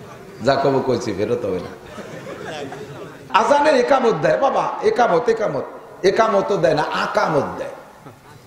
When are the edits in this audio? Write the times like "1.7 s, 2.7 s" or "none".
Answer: 3.2 s

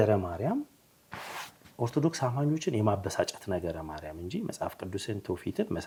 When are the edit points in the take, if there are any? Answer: none

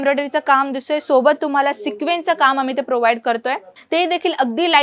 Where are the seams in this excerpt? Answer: 3.7 s

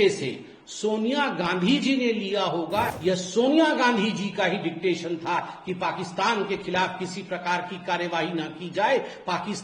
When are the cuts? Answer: 2.9 s

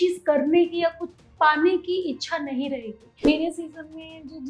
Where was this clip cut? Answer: 3.1 s

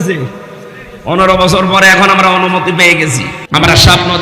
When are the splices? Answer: 3.3 s

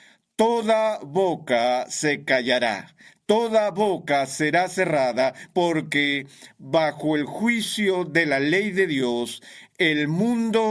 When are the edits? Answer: none

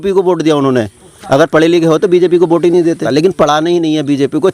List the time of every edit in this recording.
3.0 s

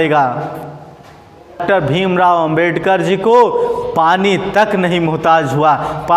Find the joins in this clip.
1.6 s

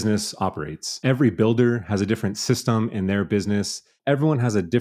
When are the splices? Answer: 1.0 s, 4.0 s

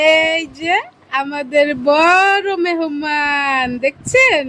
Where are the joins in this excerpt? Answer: none

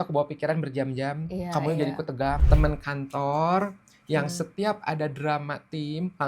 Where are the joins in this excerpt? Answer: 2.4 s

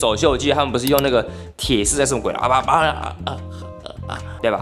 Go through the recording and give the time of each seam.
none

